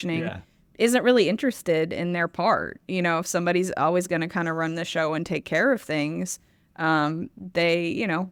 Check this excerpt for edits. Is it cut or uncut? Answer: uncut